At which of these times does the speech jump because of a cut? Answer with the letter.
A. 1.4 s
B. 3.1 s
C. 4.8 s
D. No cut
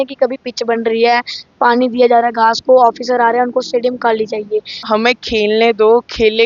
C